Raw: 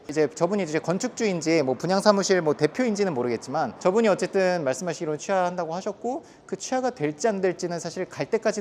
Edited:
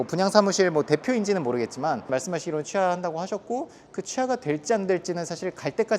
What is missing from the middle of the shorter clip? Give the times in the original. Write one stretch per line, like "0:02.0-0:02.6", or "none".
0:03.8-0:04.6